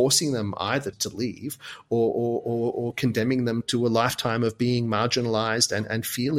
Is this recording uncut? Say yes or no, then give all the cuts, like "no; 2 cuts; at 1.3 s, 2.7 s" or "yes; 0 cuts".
no; 2 cuts; at 1.0 s, 3.6 s